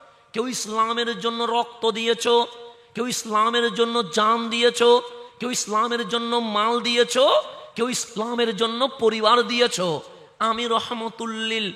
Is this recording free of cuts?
yes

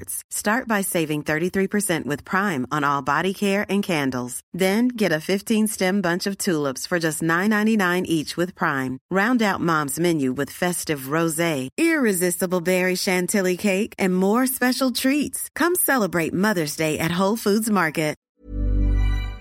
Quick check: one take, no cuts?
no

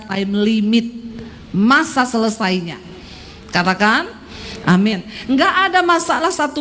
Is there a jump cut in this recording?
no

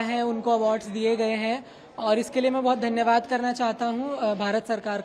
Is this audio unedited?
yes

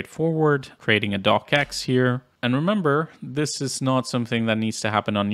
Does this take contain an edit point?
yes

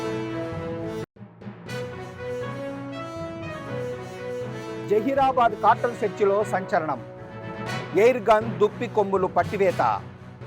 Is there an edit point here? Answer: yes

